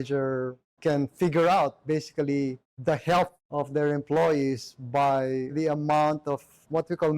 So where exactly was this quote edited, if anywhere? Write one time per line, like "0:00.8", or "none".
0:05.5